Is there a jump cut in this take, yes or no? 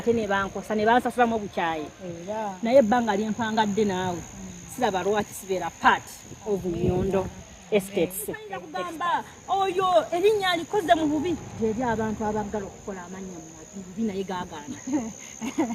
yes